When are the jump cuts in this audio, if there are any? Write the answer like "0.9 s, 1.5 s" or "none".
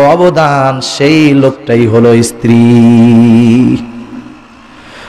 none

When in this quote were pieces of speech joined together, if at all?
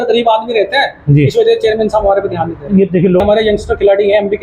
3.2 s

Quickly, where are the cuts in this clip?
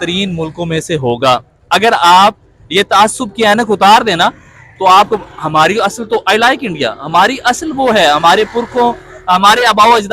none

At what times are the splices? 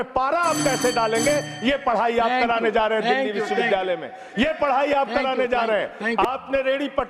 6.1 s

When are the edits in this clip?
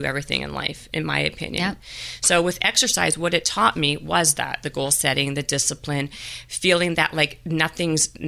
none

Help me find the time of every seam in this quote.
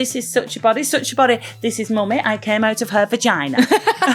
none

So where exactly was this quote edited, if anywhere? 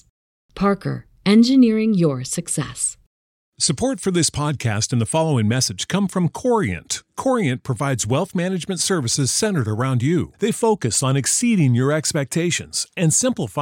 3.6 s

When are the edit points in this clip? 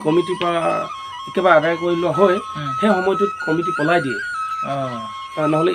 none

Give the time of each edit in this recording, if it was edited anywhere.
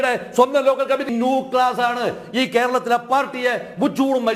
1.1 s

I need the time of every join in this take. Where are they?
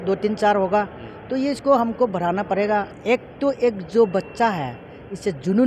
2.9 s

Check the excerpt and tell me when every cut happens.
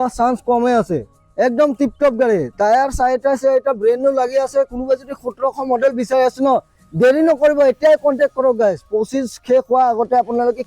1.1 s

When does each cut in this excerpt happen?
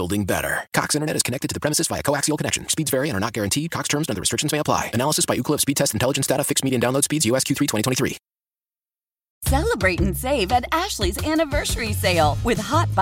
9.3 s

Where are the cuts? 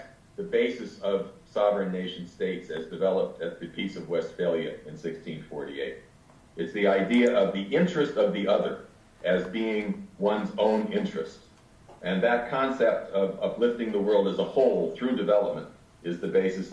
none

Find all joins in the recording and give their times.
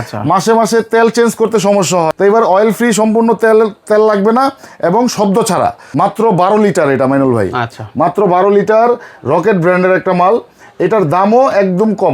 2.1 s, 5.8 s

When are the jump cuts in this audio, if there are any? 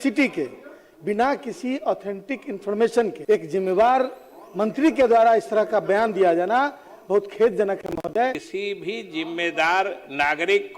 3.2 s, 8.4 s

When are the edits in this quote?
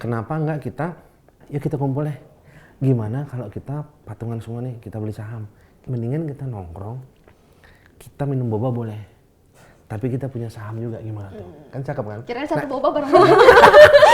1.4 s, 5.7 s

